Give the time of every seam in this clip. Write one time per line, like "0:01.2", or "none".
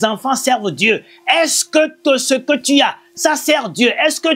none